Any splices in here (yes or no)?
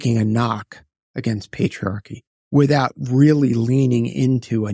no